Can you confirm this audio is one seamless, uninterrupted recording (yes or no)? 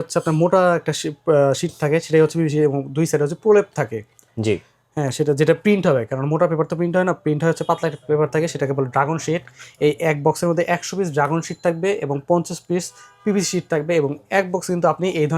yes